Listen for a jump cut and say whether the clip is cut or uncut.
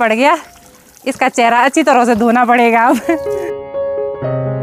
uncut